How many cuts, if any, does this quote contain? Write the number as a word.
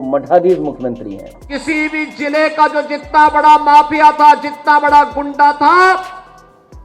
one